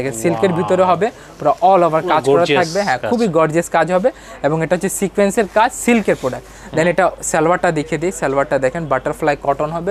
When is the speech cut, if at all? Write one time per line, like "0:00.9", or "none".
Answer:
none